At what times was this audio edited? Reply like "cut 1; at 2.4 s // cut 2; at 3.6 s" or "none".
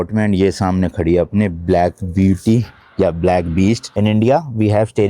cut 1; at 3.9 s